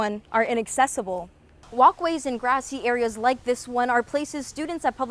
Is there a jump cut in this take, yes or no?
yes